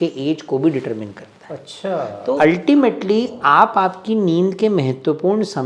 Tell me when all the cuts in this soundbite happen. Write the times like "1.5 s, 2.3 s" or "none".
2.4 s